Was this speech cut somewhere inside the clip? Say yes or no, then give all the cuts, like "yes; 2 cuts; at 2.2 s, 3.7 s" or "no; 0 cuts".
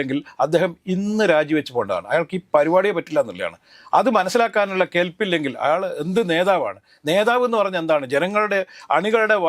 no; 0 cuts